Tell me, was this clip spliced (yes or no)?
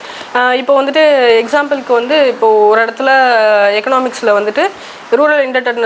no